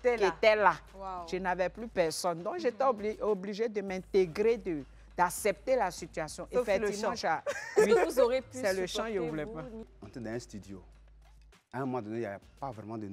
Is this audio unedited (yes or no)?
no